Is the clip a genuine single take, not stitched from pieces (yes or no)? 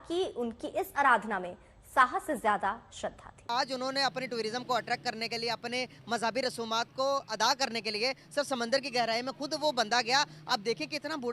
no